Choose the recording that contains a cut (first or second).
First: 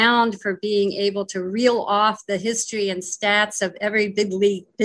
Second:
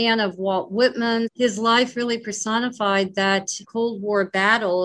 second